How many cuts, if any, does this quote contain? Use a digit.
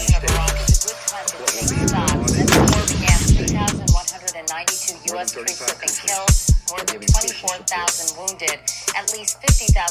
0